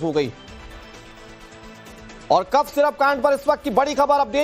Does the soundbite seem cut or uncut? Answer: cut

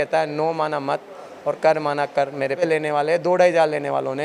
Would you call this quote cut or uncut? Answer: cut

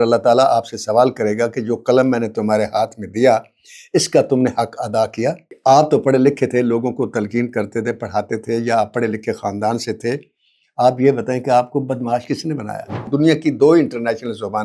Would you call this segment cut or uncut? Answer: cut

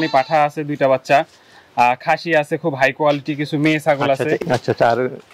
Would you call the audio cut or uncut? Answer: cut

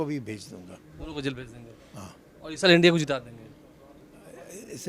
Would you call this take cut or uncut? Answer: uncut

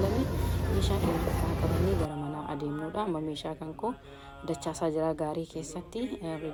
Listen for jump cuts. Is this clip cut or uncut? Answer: uncut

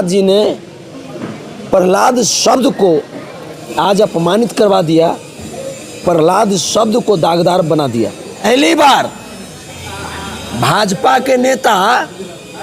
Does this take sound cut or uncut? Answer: cut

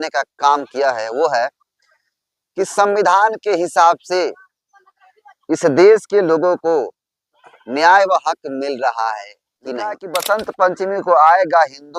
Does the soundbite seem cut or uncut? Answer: cut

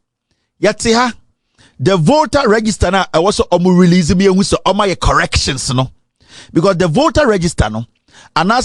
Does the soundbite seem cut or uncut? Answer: uncut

